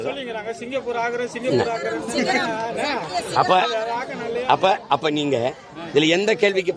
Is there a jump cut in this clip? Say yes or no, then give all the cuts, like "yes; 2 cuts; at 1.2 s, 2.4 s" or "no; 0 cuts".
no; 0 cuts